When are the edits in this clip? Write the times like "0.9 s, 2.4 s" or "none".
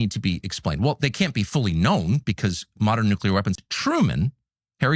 3.6 s